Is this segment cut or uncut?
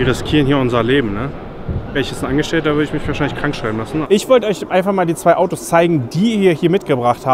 cut